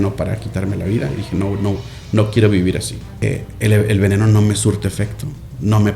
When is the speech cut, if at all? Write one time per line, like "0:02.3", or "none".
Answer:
0:03.2